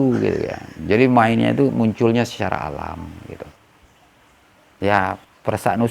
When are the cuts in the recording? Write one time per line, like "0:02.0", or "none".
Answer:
0:03.7